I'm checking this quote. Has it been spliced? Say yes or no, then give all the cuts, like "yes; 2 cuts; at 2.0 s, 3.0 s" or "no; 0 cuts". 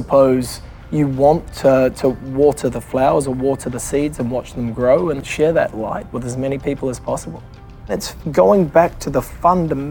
yes; 2 cuts; at 5.2 s, 8.1 s